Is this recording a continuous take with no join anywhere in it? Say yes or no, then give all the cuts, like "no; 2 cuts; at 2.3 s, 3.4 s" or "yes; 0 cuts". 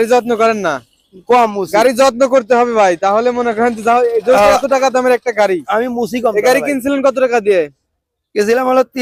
yes; 0 cuts